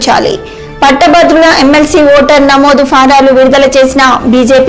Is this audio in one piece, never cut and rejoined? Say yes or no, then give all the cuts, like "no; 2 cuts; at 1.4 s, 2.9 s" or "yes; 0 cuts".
yes; 0 cuts